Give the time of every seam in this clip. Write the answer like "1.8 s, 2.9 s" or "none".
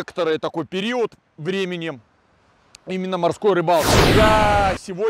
4.0 s